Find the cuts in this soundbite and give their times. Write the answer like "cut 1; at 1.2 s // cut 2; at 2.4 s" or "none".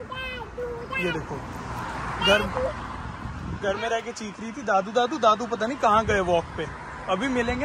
none